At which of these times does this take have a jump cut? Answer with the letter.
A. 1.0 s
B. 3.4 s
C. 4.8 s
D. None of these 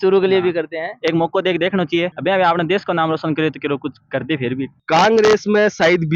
C